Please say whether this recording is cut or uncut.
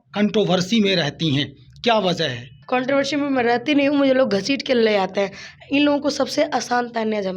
cut